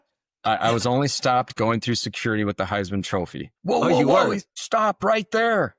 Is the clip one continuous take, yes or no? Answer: no